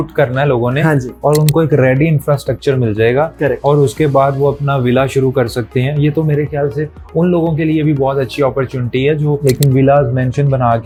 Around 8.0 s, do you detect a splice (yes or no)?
no